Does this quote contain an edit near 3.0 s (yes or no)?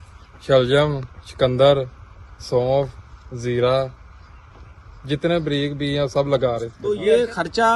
no